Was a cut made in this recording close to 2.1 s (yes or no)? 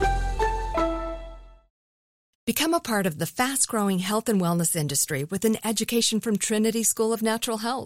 yes